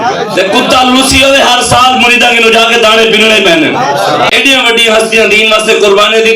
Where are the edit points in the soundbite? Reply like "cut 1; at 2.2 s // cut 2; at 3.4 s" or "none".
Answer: cut 1; at 4.3 s